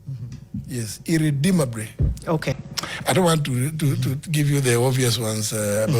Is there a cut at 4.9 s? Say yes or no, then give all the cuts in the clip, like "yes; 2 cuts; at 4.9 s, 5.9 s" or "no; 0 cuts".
no; 1 cut; at 2.6 s